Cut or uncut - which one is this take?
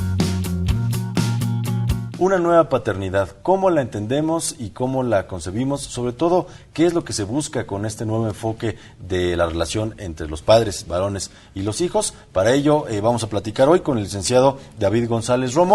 cut